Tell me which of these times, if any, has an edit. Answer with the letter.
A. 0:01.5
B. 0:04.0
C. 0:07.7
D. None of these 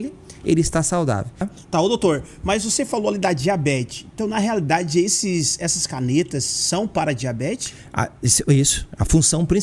A